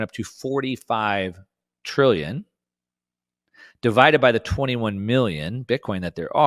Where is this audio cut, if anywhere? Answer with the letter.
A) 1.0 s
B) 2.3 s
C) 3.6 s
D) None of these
D